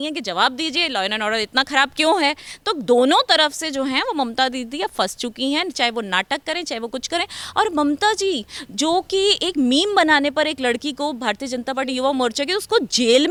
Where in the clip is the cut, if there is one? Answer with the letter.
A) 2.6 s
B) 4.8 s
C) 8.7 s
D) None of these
D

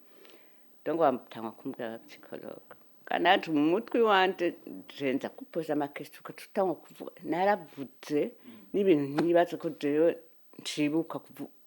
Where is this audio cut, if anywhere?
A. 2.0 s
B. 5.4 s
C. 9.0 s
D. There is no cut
B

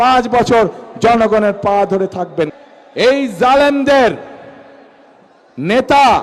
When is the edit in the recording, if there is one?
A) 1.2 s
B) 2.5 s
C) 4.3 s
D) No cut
B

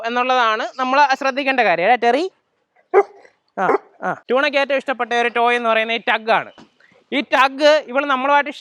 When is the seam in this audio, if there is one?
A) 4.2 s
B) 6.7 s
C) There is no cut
A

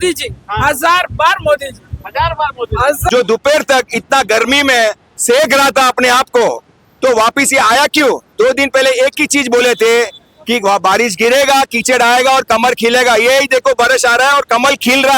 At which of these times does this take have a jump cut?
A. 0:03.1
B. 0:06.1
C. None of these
A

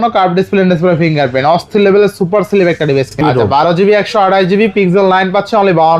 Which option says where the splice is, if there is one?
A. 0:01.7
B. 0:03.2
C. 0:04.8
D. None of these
B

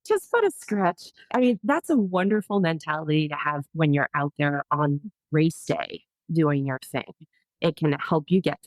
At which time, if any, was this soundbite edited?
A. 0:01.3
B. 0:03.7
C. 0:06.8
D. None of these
A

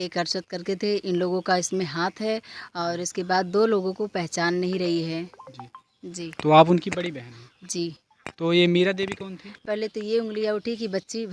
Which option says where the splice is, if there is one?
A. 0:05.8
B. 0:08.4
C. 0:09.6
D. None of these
C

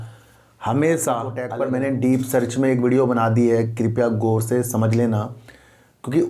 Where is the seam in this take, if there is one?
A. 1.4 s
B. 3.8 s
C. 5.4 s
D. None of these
A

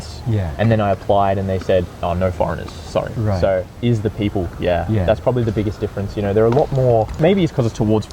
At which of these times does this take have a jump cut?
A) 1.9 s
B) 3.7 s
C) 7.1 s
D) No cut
B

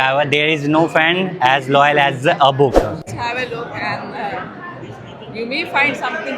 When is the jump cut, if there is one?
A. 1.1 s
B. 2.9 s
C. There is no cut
B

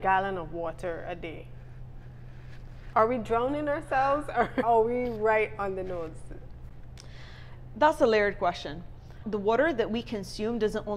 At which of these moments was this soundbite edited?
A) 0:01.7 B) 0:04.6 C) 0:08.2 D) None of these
B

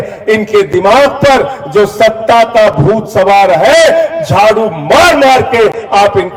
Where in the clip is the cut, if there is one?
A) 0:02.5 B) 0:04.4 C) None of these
C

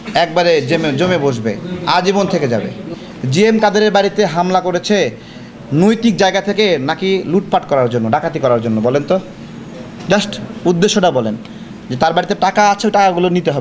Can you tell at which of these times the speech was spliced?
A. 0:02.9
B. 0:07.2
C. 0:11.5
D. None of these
A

